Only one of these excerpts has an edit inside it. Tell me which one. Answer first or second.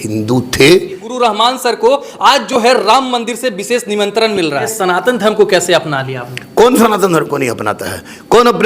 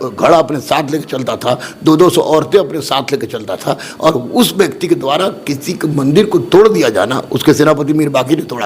first